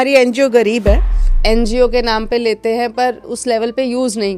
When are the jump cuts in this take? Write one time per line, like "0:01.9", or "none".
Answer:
0:01.3
0:03.3